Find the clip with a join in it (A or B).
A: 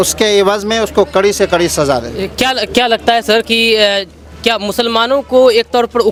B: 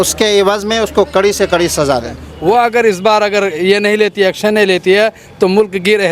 B